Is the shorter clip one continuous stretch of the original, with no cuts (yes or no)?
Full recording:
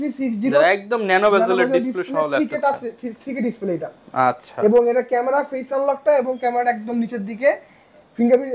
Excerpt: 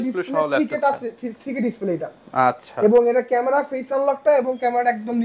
yes